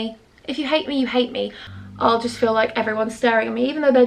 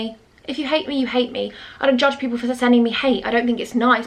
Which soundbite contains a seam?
first; 1 cut; at 1.6 s

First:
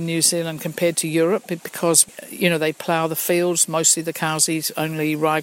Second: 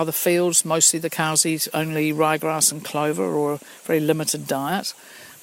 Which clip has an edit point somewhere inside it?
first; 1 cut; at 2.0 s

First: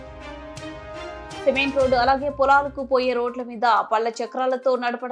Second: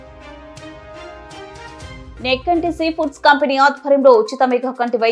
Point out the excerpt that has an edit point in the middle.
second; 1 cut; at 1.4 s

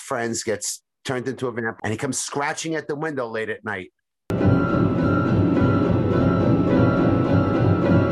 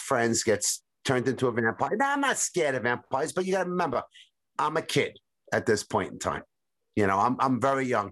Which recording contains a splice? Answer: first; 1 cut; at 1.7 s

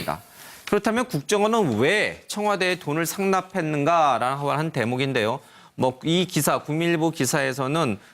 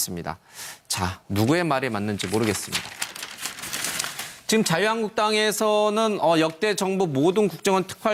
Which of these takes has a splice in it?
first; 1 cut; at 4.6 s

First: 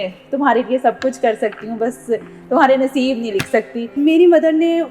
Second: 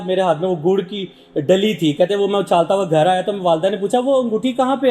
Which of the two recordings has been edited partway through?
first; 1 cut; at 3.9 s

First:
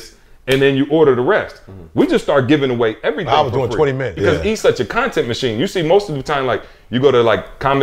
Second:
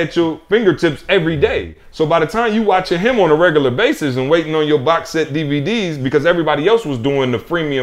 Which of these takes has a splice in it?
first; 1 cut; at 4.2 s

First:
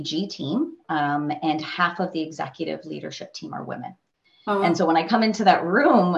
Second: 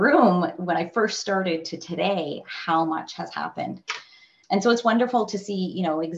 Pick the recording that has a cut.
second; 1 cut; at 4.4 s

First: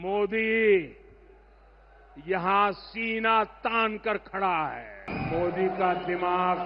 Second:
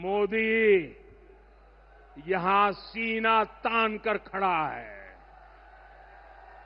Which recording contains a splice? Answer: first; 1 cut; at 5.1 s

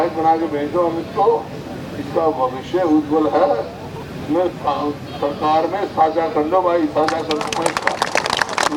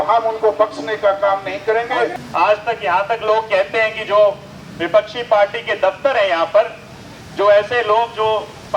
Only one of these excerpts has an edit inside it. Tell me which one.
second; 1 cut; at 2.1 s

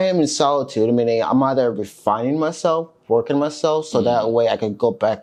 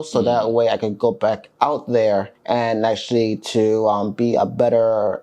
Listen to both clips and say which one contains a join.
second; 1 cut; at 2.3 s

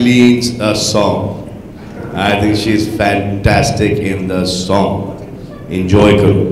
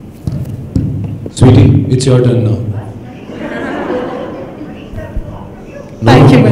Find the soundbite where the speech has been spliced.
second; 1 cut; at 1.3 s

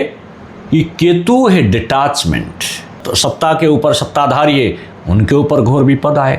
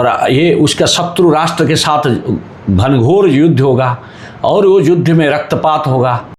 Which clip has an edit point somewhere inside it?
first; 1 cut; at 3.0 s

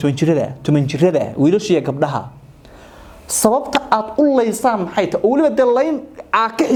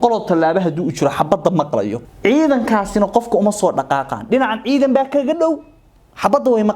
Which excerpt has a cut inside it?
second; 1 cut; at 2.0 s

